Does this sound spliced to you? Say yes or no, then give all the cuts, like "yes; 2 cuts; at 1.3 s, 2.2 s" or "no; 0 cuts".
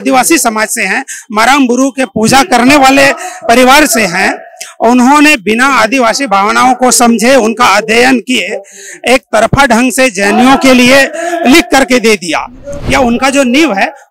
yes; 1 cut; at 12.7 s